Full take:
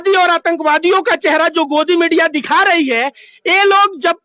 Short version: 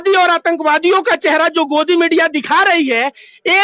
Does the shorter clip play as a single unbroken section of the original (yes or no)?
yes